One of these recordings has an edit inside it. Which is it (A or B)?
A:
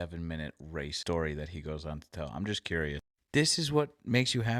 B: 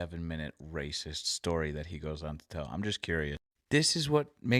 A